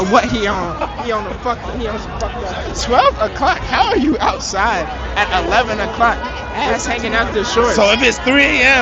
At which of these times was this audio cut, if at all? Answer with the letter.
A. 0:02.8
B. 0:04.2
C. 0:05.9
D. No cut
A